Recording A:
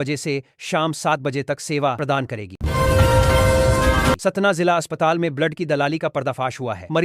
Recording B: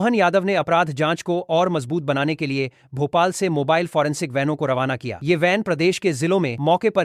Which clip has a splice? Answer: A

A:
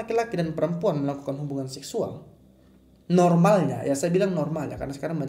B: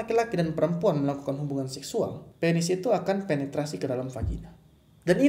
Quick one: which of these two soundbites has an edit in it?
B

